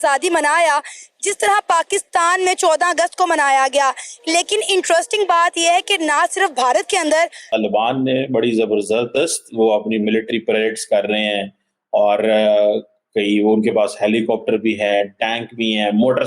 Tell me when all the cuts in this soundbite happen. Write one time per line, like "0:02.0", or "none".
0:07.4